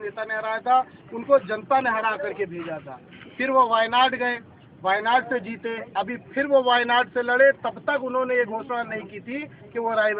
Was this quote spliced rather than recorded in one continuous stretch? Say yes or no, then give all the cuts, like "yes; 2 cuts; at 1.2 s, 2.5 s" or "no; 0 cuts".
no; 0 cuts